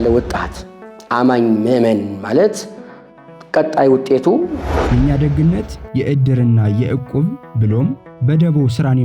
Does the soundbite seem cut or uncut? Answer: cut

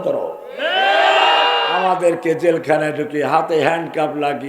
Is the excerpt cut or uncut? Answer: cut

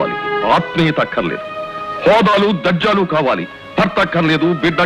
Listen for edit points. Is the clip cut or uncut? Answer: uncut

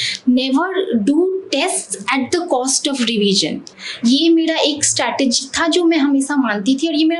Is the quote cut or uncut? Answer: uncut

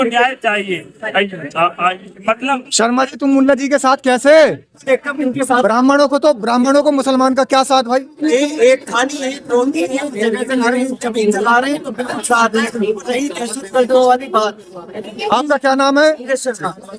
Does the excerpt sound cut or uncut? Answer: uncut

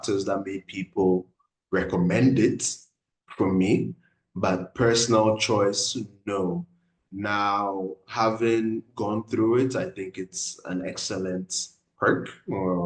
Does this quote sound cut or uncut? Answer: uncut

